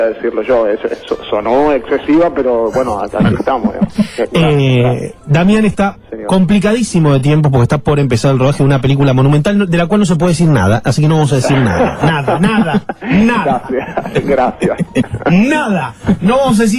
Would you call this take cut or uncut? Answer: uncut